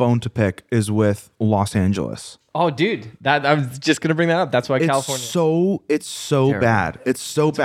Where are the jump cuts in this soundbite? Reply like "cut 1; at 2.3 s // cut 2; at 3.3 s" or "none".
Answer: none